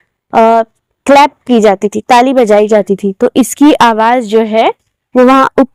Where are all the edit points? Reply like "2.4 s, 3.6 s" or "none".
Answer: none